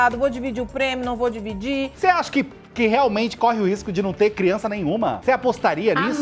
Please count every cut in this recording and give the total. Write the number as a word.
two